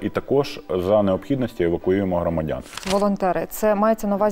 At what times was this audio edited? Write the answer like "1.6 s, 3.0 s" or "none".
2.8 s